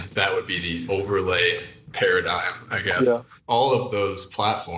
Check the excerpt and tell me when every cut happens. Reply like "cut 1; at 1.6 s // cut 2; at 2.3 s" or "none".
cut 1; at 3.4 s